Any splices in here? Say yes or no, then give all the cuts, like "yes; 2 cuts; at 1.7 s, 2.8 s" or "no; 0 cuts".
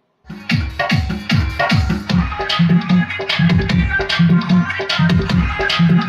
no; 0 cuts